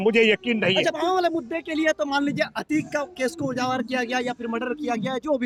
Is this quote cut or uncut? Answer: uncut